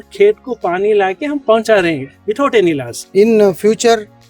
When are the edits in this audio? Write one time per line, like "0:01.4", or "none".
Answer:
0:02.9